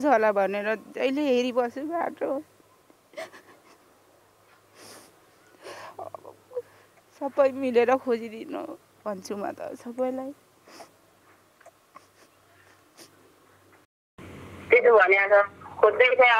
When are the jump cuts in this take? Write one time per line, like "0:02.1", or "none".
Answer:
0:13.9